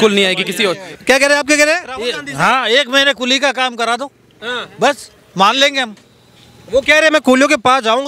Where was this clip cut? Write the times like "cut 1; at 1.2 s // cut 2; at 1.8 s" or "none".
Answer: cut 1; at 1.0 s